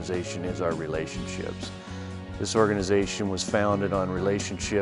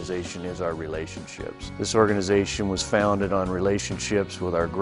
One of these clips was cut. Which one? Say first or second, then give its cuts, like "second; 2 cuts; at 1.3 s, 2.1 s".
second; 1 cut; at 1.7 s